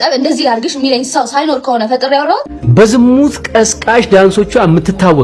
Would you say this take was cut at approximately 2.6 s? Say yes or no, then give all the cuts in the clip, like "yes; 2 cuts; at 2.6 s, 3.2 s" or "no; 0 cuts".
yes; 1 cut; at 2.6 s